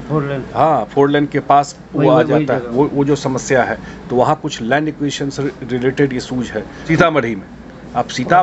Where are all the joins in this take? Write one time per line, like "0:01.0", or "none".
0:06.8